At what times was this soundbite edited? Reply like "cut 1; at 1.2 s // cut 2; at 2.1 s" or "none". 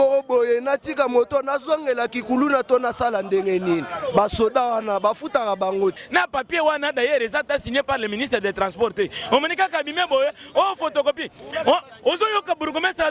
cut 1; at 6.0 s